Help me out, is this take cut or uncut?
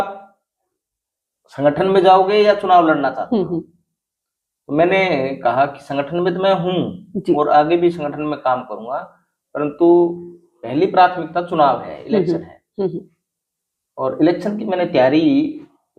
uncut